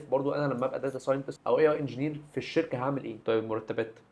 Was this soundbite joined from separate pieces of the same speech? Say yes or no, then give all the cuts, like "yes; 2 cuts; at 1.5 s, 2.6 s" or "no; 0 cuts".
yes; 2 cuts; at 1.3 s, 3.2 s